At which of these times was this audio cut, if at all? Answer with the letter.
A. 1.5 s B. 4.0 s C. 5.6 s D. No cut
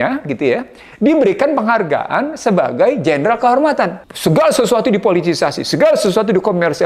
B